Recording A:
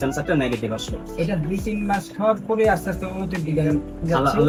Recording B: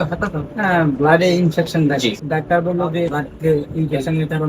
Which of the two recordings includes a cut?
B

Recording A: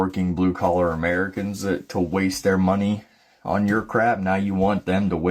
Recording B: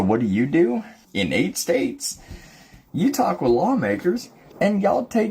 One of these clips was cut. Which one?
B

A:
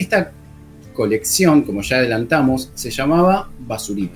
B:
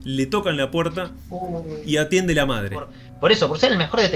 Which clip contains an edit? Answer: B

